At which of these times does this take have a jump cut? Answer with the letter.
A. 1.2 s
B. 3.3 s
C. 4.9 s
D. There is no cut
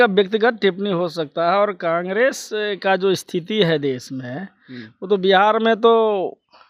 D